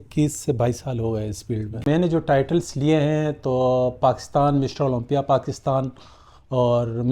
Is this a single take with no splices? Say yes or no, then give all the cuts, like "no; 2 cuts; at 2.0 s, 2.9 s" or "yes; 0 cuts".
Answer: no; 1 cut; at 1.7 s